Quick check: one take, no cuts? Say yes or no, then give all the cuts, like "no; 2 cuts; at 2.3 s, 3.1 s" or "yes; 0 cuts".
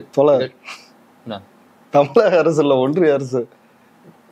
yes; 0 cuts